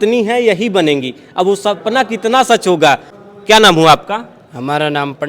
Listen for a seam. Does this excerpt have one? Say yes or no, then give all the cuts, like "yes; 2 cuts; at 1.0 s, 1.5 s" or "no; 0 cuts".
no; 0 cuts